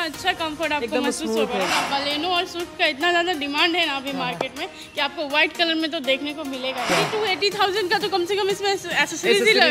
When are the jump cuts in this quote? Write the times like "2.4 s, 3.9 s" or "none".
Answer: 1.7 s, 6.9 s